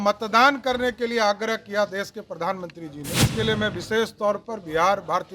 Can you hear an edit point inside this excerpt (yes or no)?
yes